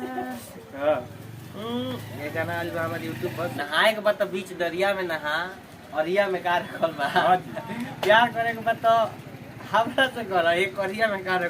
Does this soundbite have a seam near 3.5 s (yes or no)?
yes